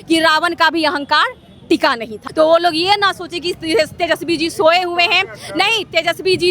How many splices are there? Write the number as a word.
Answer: one